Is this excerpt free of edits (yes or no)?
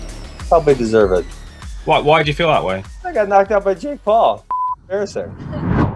yes